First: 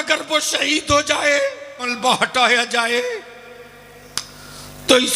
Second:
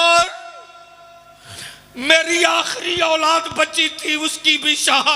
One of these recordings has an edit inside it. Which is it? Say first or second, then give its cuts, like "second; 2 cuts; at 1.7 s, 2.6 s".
first; 1 cut; at 1.9 s